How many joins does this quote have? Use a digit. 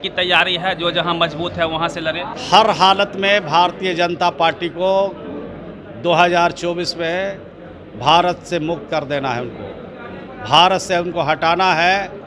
1